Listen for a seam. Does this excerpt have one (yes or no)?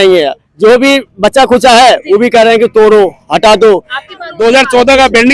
yes